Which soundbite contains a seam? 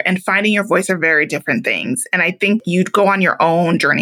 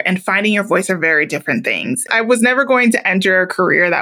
second; 1 cut; at 2.1 s

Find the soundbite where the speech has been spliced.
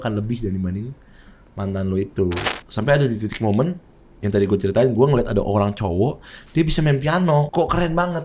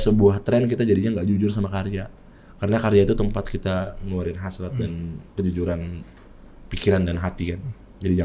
first; 2 cuts; at 2.4 s, 7.5 s

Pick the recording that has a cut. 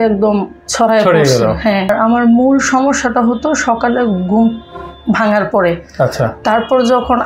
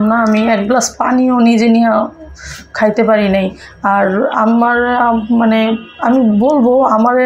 first; 1 cut; at 1.9 s

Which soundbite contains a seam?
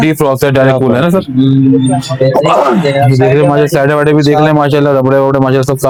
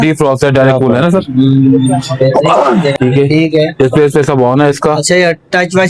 second; 1 cut; at 2.9 s

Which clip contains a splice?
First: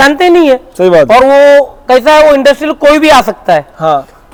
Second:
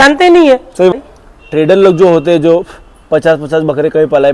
second; 1 cut; at 0.9 s

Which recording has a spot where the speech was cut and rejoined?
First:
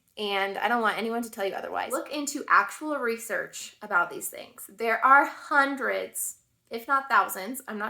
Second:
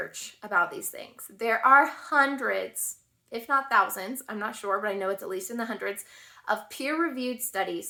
first; 1 cut; at 2.0 s

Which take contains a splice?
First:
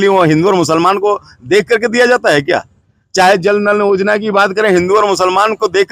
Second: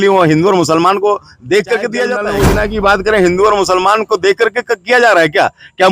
second; 1 cut; at 2.2 s

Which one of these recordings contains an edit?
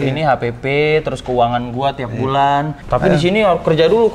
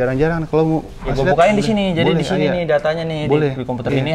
first; 1 cut; at 2.8 s

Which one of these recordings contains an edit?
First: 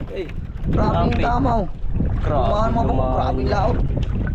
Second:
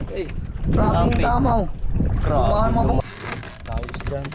second; 1 cut; at 3.0 s

